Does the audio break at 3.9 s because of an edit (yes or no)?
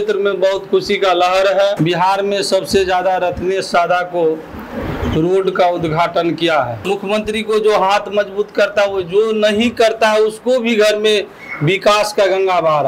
no